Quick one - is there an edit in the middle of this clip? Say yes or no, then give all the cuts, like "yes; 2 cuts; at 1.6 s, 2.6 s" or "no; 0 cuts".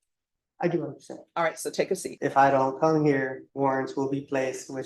yes; 2 cuts; at 2.1 s, 3.4 s